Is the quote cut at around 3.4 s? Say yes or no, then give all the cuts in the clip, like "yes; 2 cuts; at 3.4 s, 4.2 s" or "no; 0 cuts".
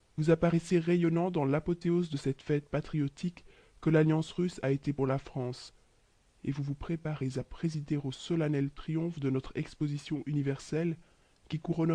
no; 1 cut; at 10.9 s